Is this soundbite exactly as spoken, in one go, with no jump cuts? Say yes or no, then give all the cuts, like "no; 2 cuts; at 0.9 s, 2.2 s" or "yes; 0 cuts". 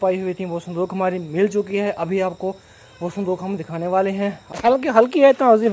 no; 1 cut; at 4.4 s